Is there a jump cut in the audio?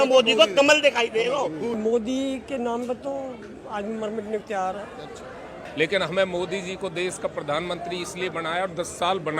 yes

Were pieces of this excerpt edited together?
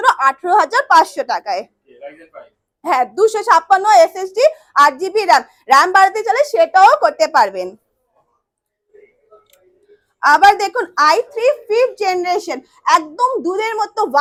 no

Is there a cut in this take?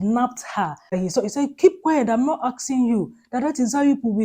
yes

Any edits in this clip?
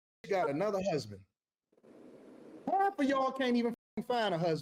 no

